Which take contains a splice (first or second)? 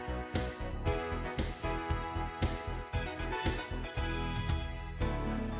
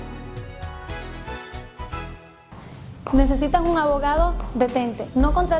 second